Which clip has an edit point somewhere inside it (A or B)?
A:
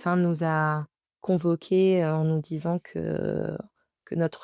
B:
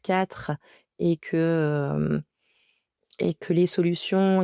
A